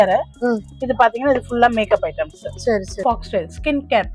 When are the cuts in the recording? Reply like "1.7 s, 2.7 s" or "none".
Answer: 2.9 s